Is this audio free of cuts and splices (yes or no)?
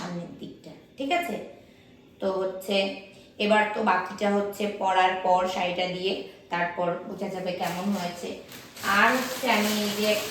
yes